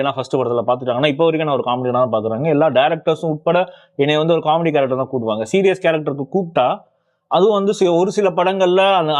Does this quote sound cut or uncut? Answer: uncut